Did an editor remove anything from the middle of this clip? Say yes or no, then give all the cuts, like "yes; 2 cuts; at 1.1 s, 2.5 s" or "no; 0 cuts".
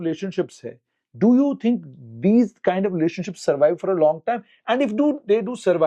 no; 0 cuts